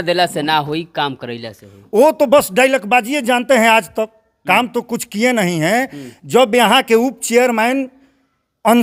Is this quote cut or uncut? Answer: uncut